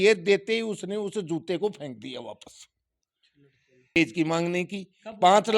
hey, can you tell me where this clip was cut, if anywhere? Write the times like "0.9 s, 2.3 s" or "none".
4.0 s